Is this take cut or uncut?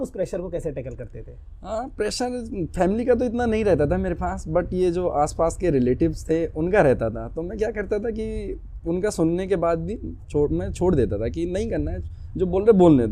uncut